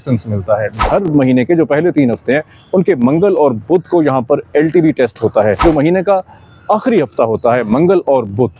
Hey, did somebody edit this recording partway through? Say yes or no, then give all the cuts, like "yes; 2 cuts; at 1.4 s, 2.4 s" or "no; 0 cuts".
yes; 2 cuts; at 0.8 s, 5.6 s